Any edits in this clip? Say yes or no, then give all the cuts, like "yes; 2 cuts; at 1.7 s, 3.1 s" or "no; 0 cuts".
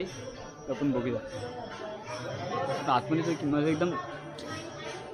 no; 0 cuts